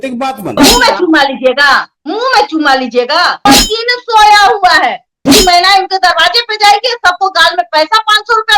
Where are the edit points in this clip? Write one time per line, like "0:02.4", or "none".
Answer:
0:03.4
0:05.3